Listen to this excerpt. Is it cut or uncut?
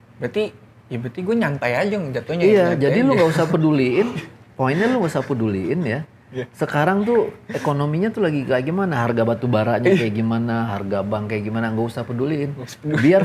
uncut